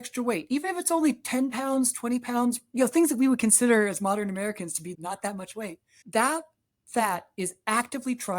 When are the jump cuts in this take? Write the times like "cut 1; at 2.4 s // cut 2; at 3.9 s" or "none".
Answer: cut 1; at 4.9 s